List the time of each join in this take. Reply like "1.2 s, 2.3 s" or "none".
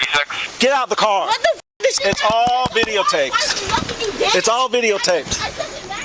2.0 s

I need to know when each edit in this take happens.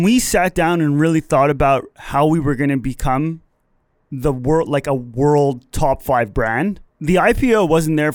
6.9 s

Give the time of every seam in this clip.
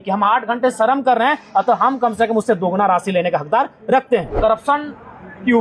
4.4 s

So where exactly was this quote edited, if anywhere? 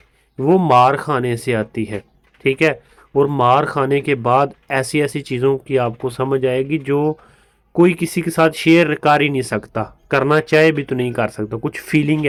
none

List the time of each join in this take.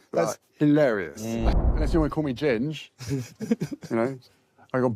1.8 s

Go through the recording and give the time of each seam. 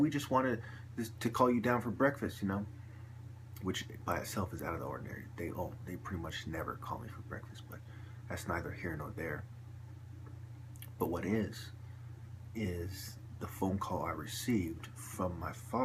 6.4 s

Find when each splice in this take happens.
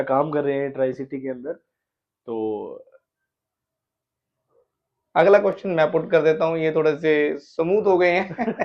none

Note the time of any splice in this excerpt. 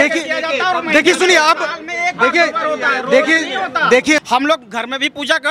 4.2 s

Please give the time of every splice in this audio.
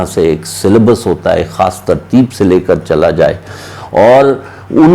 none

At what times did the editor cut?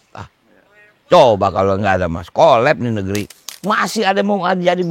3.5 s

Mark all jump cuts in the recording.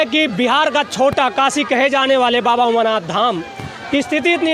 none

